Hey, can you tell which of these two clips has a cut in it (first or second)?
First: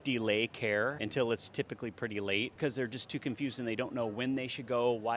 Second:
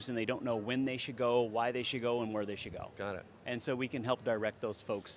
first